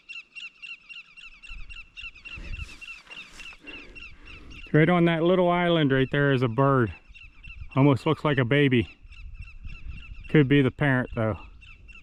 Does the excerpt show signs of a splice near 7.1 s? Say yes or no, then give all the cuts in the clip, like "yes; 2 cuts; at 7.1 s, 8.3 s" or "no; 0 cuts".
no; 0 cuts